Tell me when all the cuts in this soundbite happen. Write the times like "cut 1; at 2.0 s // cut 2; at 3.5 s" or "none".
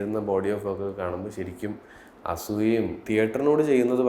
cut 1; at 3.0 s